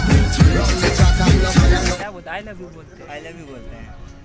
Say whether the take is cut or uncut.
cut